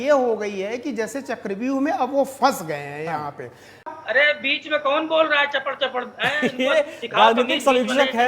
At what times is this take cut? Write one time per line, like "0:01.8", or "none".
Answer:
0:03.9